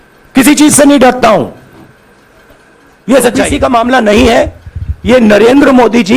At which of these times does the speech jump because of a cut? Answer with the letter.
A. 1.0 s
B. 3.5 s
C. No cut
B